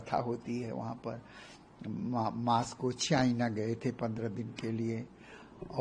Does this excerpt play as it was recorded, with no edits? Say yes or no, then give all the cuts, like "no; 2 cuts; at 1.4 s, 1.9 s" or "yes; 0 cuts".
yes; 0 cuts